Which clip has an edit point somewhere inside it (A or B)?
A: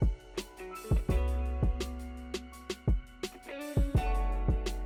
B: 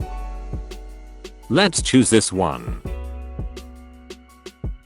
B